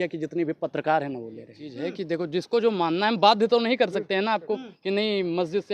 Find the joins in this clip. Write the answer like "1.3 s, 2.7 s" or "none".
1.5 s